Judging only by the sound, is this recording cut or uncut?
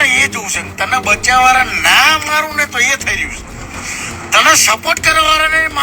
uncut